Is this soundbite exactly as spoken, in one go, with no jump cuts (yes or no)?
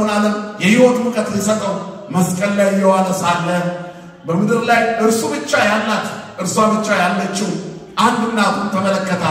yes